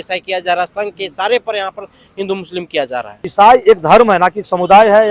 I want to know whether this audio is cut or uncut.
cut